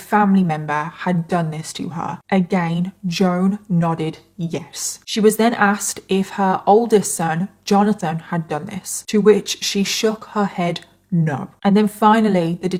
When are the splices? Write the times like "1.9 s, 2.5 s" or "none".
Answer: none